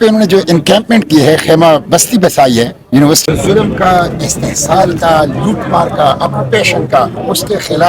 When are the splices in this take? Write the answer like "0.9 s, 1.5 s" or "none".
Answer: 3.2 s